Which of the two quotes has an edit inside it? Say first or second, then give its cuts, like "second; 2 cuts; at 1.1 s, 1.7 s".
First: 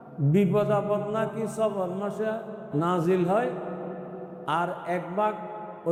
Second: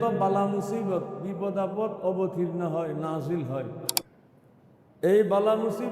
second; 1 cut; at 4.1 s